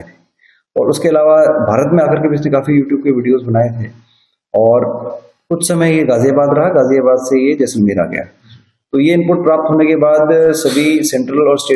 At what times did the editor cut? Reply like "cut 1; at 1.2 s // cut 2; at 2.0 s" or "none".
none

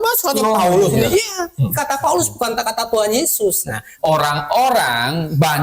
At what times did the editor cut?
cut 1; at 3.9 s

